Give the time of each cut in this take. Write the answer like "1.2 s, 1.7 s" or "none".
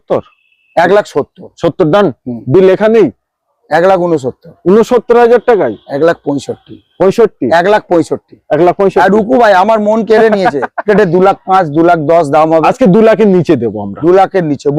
10.8 s